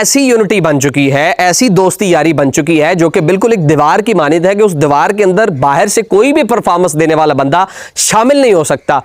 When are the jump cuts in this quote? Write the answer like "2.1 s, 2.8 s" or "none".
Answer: none